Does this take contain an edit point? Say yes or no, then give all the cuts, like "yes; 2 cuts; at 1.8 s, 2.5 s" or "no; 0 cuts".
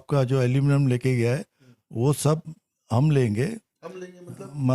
no; 0 cuts